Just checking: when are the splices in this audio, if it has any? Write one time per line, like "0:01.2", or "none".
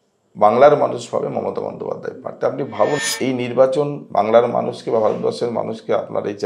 0:03.0